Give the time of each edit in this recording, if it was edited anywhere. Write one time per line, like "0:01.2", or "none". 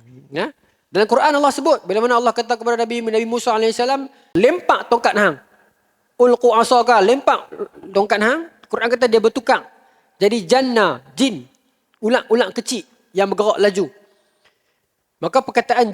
0:04.3